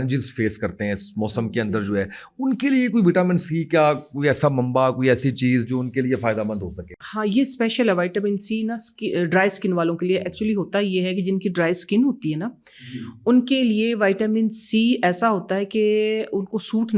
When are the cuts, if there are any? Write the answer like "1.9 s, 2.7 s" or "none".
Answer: none